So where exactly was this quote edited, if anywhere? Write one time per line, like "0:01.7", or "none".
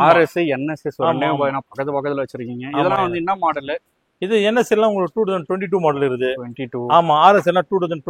none